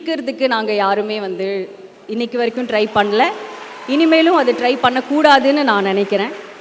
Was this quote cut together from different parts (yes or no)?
no